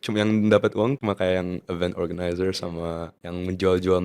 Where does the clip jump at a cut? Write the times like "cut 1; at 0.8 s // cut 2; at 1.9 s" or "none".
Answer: cut 1; at 1.0 s // cut 2; at 3.2 s